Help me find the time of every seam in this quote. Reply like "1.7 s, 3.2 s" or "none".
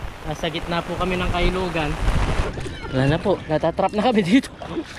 2.4 s